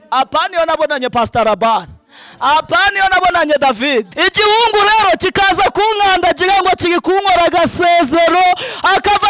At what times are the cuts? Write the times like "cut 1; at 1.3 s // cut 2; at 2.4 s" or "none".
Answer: cut 1; at 4.1 s